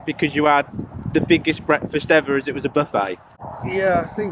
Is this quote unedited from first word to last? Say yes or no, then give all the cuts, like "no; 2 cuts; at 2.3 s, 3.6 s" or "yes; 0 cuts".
yes; 0 cuts